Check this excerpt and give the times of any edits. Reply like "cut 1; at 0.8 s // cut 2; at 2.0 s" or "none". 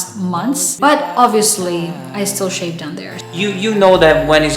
cut 1; at 3.0 s